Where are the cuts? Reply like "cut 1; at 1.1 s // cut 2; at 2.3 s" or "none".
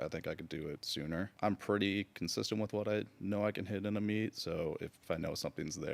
cut 1; at 1.3 s // cut 2; at 5.0 s